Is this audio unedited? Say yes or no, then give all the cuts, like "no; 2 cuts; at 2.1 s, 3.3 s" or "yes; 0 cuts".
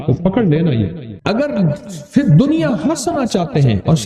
no; 1 cut; at 1.1 s